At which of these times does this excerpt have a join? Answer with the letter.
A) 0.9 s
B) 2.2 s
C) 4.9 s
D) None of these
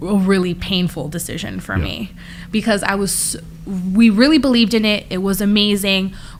D